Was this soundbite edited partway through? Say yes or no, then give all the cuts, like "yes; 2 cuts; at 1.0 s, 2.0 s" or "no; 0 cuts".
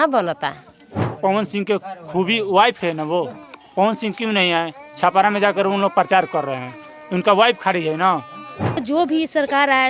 yes; 2 cuts; at 1.2 s, 8.8 s